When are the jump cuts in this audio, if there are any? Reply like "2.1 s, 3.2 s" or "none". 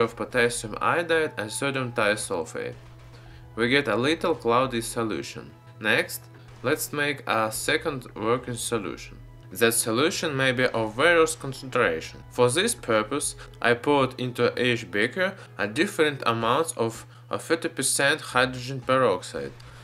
none

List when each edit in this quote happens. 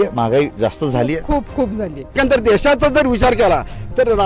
2.1 s

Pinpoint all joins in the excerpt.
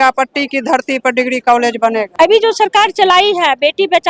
2.1 s

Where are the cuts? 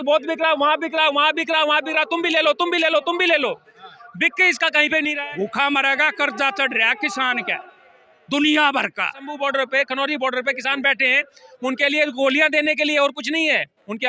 5.1 s, 9.3 s

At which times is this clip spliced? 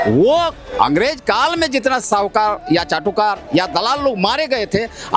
none

